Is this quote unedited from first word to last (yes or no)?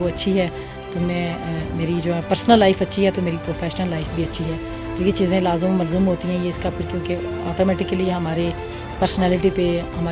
yes